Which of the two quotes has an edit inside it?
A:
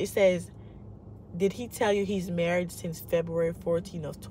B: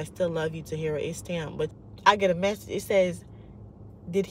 B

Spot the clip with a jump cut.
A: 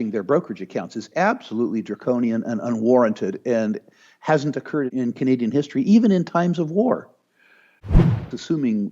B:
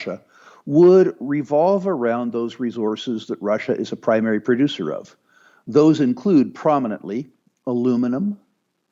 A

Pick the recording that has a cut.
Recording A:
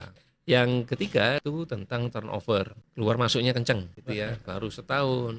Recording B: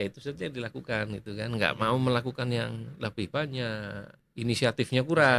A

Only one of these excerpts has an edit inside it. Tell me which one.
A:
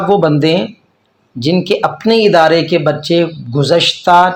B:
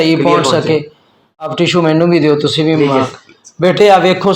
B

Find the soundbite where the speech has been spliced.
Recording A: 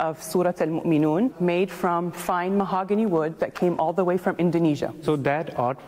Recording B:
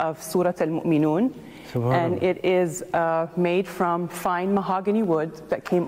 A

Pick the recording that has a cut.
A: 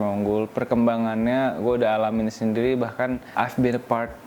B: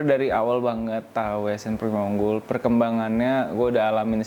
A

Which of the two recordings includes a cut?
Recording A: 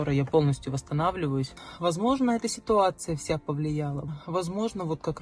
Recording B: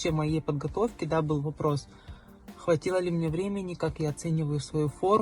A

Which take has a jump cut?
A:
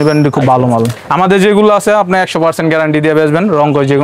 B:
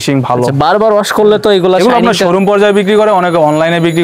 A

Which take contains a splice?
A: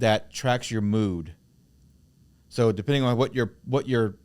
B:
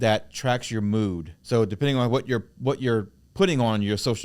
B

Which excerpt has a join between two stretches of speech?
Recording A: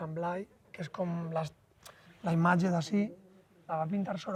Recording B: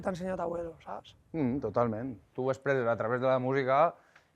B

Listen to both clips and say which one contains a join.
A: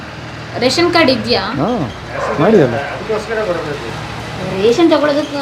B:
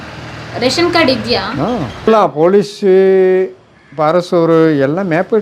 B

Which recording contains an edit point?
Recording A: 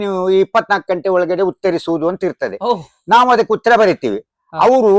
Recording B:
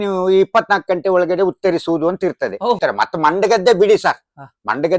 B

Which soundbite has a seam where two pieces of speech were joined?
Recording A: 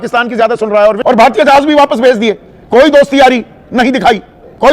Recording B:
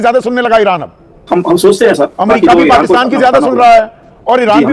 A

